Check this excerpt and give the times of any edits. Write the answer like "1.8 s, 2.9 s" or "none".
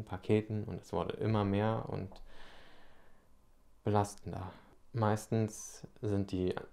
none